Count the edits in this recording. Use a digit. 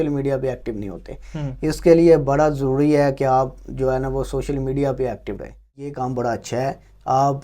1